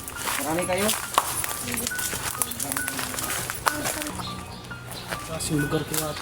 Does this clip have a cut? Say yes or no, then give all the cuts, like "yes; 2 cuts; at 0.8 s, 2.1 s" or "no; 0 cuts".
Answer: yes; 1 cut; at 4.1 s